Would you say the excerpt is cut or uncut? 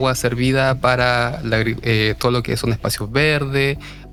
uncut